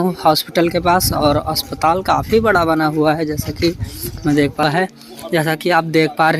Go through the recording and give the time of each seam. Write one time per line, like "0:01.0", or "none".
0:04.6